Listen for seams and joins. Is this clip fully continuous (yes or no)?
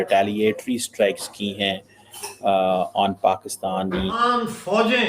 no